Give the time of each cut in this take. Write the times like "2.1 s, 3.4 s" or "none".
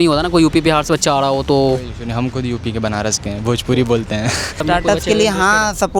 4.6 s